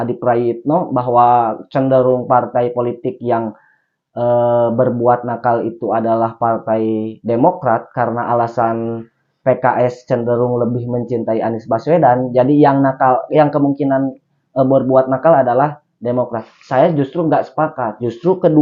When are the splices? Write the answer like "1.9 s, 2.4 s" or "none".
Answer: none